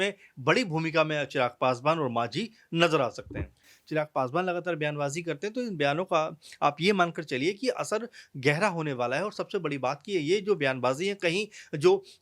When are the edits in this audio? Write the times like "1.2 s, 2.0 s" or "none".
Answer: 3.7 s